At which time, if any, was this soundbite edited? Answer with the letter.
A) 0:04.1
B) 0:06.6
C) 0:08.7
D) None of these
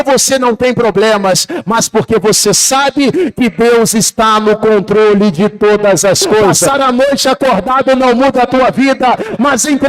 B